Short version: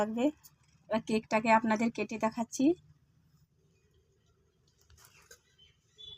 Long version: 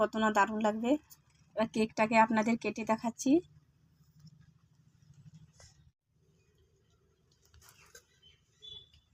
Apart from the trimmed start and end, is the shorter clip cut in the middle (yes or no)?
yes